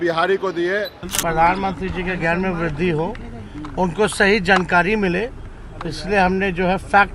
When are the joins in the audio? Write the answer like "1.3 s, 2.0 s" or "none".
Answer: 1.0 s